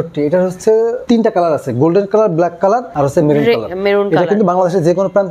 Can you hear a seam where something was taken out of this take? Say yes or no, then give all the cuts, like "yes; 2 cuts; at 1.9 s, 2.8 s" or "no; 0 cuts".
yes; 2 cuts; at 1.0 s, 2.9 s